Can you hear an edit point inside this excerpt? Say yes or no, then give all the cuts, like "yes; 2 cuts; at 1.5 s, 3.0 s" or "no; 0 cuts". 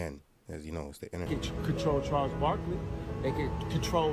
yes; 1 cut; at 1.3 s